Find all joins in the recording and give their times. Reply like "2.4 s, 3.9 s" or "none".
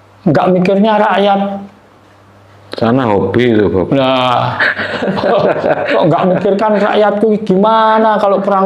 none